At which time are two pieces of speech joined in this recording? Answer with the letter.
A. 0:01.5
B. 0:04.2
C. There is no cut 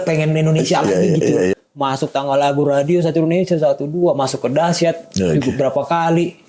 A